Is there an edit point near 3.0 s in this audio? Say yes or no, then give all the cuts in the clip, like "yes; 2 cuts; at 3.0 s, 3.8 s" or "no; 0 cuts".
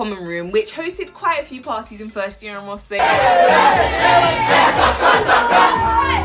yes; 1 cut; at 3.0 s